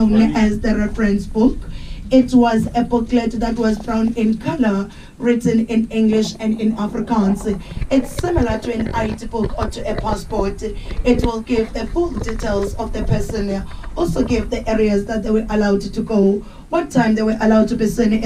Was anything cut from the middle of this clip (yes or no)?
no